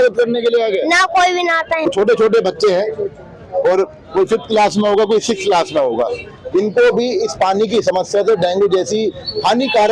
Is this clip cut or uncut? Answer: cut